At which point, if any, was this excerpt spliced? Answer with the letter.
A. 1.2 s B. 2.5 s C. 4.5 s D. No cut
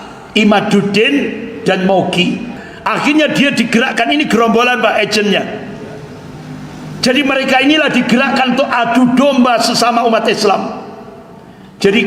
B